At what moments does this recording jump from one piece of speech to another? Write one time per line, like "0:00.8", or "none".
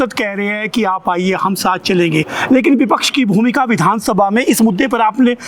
none